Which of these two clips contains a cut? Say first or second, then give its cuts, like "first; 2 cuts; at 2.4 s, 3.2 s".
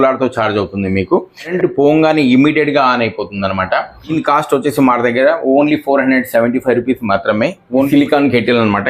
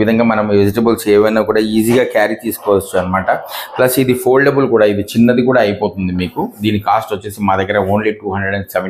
first; 3 cuts; at 1.5 s, 4.1 s, 7.9 s